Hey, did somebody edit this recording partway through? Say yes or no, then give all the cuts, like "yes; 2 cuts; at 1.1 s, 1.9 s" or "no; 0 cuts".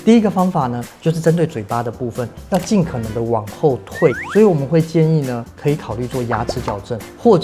no; 0 cuts